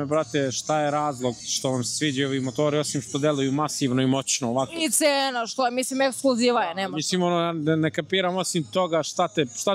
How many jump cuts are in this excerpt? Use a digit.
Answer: 0